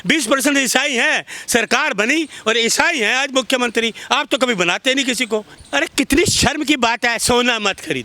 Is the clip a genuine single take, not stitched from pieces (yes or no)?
no